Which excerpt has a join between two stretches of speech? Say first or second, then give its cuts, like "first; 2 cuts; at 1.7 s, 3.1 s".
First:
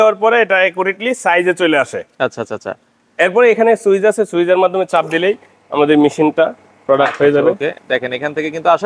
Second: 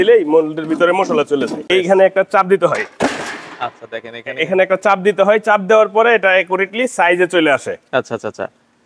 second; 1 cut; at 1.6 s